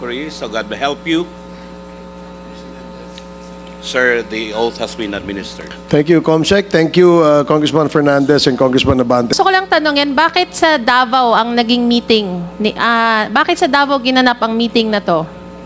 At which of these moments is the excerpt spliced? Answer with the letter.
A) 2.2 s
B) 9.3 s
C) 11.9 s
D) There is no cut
B